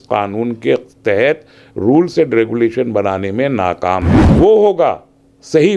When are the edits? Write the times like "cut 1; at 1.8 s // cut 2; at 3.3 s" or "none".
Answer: cut 1; at 4.2 s

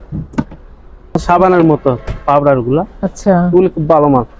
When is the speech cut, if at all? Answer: cut 1; at 1.2 s

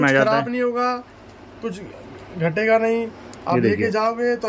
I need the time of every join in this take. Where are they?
none

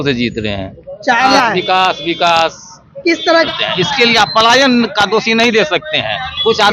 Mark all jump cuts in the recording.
cut 1; at 1.3 s // cut 2; at 3.5 s

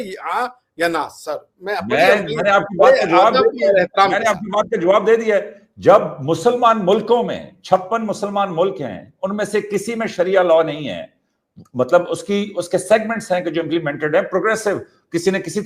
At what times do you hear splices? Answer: none

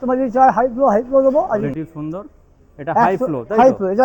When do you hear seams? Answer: cut 1; at 1.7 s

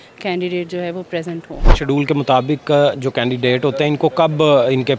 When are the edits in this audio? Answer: cut 1; at 1.6 s

